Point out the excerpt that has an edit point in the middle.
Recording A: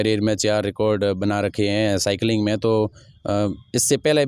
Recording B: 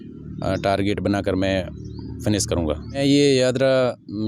B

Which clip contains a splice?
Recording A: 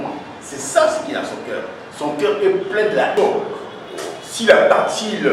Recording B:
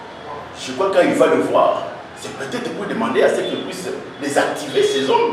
A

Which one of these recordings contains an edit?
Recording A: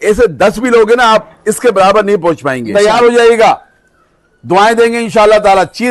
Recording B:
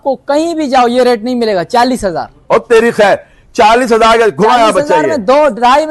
A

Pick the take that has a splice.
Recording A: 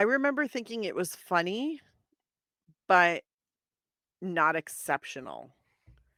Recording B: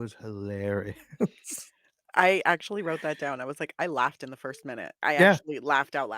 B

